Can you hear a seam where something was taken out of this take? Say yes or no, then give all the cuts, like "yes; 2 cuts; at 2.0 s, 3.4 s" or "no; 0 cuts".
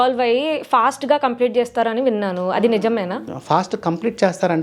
no; 0 cuts